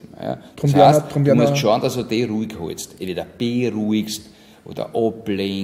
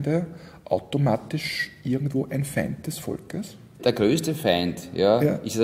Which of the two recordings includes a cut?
second; 1 cut; at 3.8 s

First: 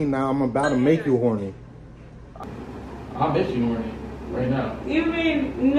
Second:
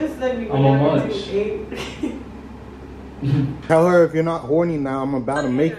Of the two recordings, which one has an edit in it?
second; 1 cut; at 3.6 s

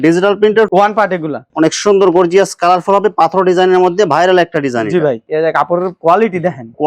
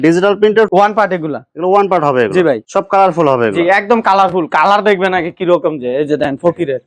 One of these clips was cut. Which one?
first; 2 cuts; at 1.4 s, 5.2 s

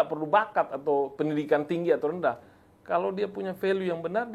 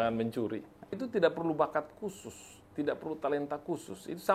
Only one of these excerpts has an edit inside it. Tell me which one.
second; 1 cut; at 1.0 s

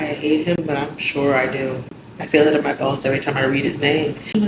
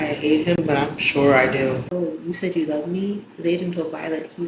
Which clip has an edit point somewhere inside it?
second; 1 cut; at 1.9 s

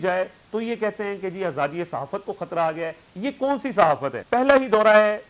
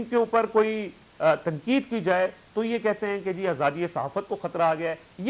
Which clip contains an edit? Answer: first; 1 cut; at 4.2 s

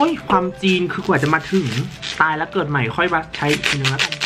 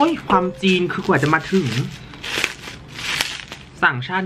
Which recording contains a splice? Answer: first; 1 cut; at 2.0 s

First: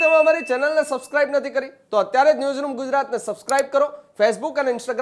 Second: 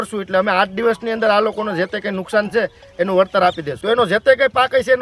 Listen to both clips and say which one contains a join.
second; 1 cut; at 3.7 s

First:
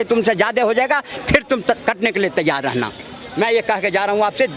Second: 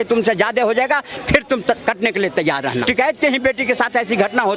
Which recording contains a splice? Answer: second; 1 cut; at 2.8 s

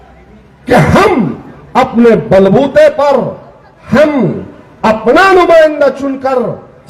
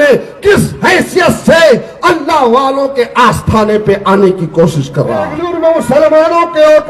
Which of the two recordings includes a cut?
second; 1 cut; at 5.4 s

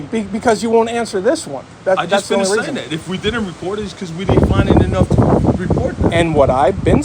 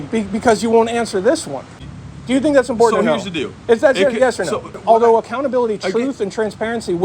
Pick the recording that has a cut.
second; 2 cuts; at 1.8 s, 4.7 s

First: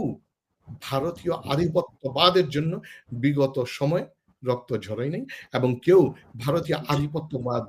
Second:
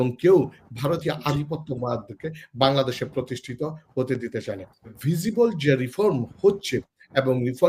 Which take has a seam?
second; 1 cut; at 5.0 s

